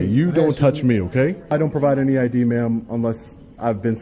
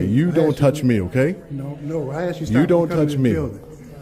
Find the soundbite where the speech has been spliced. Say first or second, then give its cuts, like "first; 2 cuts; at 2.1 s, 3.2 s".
first; 1 cut; at 1.5 s